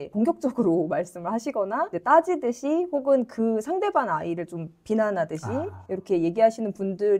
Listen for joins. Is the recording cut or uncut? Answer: uncut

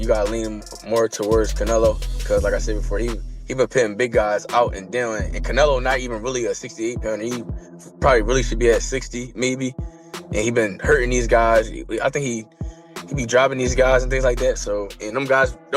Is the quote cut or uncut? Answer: uncut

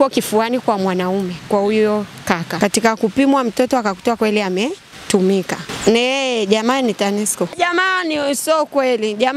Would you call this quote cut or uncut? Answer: cut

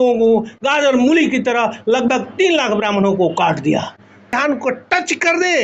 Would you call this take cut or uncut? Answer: cut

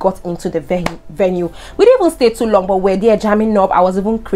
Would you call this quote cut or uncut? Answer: uncut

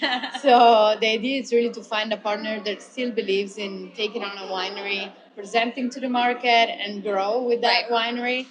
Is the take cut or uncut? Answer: uncut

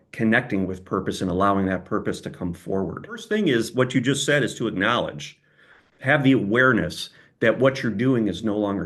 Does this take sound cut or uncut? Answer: cut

